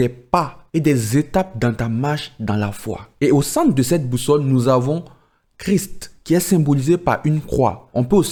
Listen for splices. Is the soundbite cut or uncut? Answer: uncut